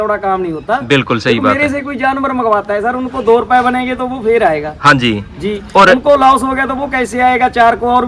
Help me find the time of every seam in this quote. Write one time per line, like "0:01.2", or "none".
none